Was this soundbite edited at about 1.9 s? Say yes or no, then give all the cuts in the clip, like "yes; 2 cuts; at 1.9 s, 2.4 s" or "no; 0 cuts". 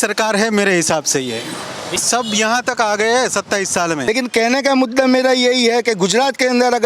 yes; 2 cuts; at 1.9 s, 4.1 s